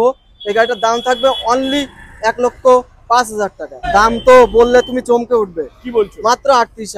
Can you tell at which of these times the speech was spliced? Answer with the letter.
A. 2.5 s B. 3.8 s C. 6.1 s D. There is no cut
B